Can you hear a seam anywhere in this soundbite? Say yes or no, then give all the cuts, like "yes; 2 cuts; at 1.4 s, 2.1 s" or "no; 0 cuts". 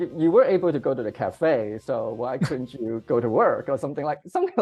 no; 0 cuts